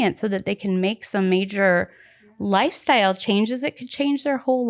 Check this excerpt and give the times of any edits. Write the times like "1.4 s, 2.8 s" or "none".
none